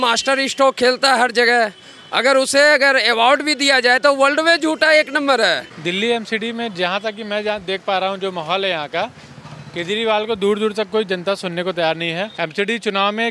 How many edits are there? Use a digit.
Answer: 2